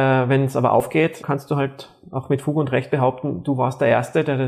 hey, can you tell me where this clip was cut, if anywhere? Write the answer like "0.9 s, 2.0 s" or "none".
1.0 s